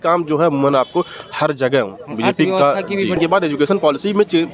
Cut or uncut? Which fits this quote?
cut